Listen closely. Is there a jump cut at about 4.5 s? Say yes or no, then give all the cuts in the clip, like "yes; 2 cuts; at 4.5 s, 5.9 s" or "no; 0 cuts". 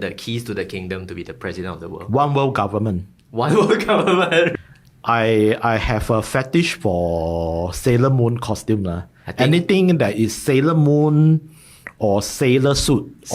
yes; 1 cut; at 4.5 s